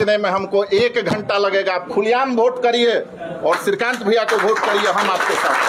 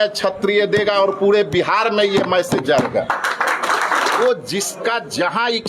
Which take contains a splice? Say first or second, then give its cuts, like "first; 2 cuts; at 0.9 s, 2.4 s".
second; 1 cut; at 4.2 s